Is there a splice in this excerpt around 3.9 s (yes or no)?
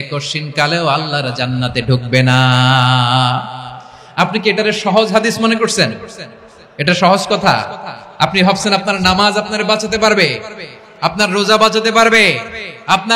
no